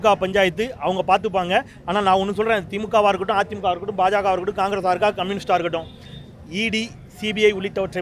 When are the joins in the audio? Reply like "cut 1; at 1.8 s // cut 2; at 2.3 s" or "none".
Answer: none